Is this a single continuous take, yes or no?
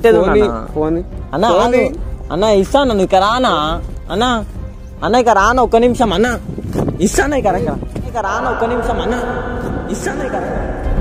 yes